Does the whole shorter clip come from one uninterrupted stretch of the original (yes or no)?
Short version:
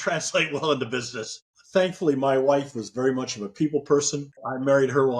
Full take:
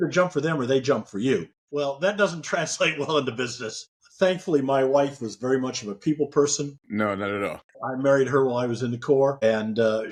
no